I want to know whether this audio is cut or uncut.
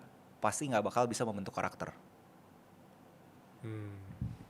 uncut